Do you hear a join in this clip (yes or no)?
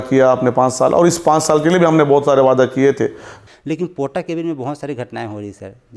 yes